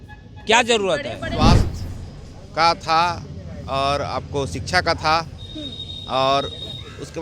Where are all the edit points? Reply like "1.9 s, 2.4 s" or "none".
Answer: 1.4 s